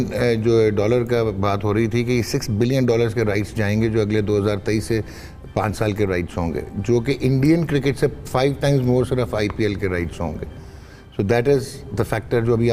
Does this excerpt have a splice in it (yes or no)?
no